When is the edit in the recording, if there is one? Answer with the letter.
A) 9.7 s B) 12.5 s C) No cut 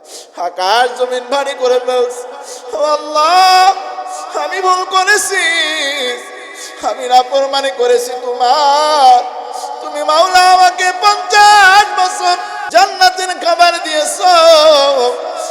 B